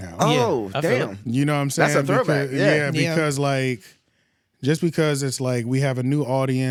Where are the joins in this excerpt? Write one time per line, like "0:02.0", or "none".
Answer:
none